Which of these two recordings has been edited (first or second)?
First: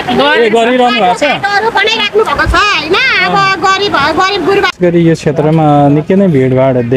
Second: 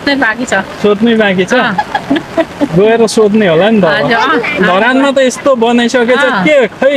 first